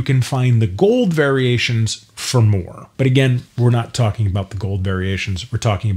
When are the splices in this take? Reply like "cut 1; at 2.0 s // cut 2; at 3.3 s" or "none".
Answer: none